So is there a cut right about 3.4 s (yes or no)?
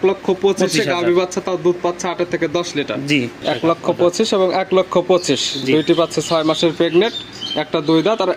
yes